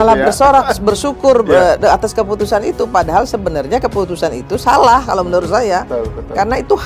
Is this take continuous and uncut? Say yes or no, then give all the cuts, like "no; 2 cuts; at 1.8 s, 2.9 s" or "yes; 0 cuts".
yes; 0 cuts